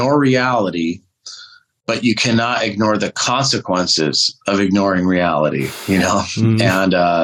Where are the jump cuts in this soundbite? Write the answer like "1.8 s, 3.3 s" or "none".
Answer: none